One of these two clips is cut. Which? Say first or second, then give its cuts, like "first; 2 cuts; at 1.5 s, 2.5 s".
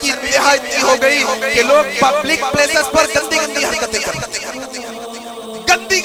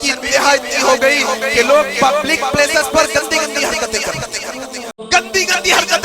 second; 1 cut; at 5.0 s